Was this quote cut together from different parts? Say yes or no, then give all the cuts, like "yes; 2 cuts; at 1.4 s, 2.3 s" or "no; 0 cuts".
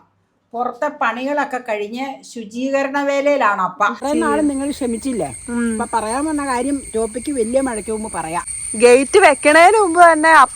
yes; 2 cuts; at 4.0 s, 8.5 s